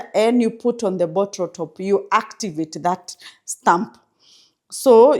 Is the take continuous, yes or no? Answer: yes